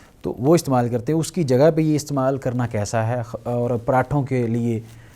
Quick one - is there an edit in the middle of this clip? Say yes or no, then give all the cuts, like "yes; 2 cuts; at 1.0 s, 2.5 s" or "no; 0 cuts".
no; 0 cuts